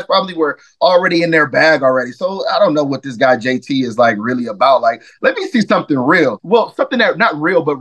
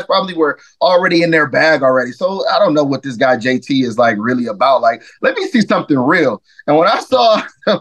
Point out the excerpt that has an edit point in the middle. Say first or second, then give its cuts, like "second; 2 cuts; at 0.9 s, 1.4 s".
first; 1 cut; at 6.4 s